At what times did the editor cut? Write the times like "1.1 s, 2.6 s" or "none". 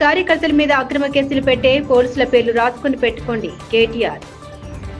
none